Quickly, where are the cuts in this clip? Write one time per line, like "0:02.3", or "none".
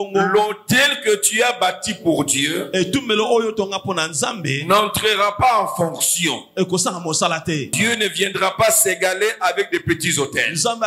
0:07.8